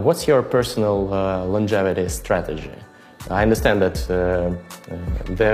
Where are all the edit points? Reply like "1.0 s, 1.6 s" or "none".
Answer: none